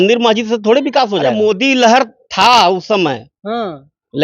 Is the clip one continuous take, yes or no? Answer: no